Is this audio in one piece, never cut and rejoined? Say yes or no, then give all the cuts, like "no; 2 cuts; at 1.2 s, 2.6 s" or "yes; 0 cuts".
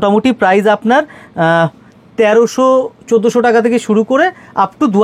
yes; 0 cuts